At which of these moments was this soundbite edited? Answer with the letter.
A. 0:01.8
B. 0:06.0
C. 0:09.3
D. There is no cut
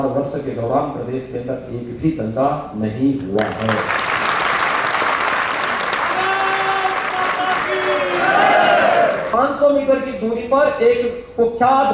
C